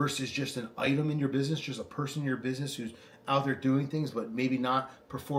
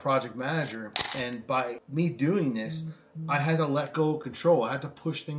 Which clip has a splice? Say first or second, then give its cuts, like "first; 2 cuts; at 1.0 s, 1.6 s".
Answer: second; 1 cut; at 1.8 s